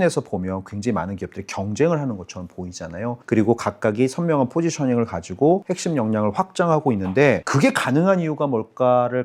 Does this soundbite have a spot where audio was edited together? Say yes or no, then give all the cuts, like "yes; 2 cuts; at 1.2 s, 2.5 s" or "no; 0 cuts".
no; 0 cuts